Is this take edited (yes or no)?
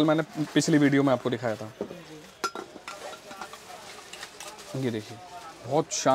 no